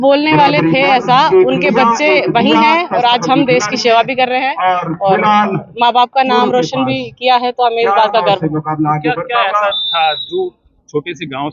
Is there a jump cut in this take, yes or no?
no